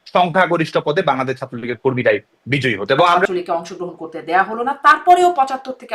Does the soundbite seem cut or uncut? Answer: cut